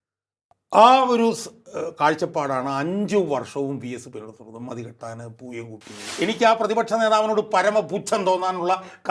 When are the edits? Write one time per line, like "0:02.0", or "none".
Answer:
0:06.1

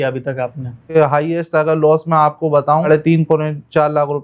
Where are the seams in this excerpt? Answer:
0:00.9
0:02.9

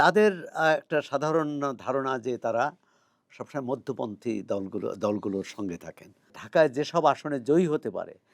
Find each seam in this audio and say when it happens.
0:06.4

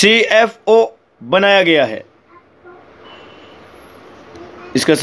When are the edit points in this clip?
0:02.5

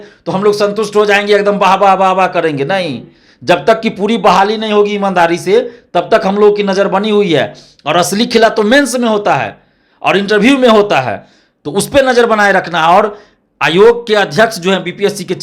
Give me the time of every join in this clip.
none

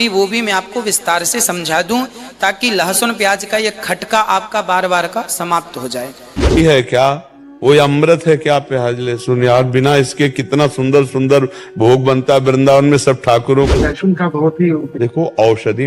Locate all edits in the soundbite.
0:06.6
0:13.8

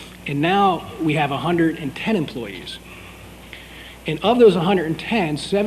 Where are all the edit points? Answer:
none

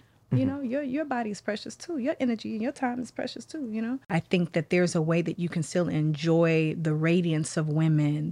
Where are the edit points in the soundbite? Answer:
0:04.1

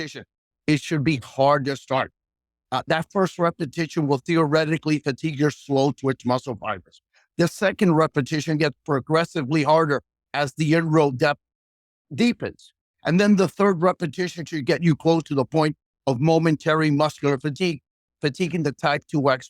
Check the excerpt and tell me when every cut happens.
none

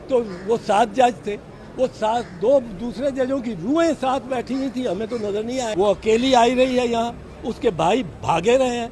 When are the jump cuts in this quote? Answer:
0:05.7

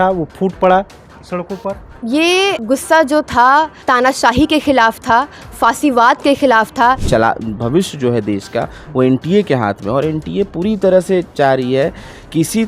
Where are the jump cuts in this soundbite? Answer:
0:01.9
0:02.6
0:03.8
0:07.0

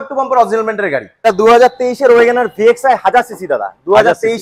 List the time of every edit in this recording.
0:01.2

